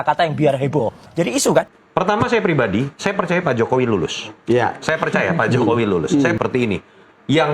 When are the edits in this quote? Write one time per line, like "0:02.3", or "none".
0:01.8
0:06.4